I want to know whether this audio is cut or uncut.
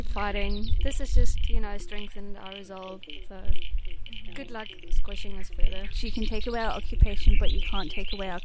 cut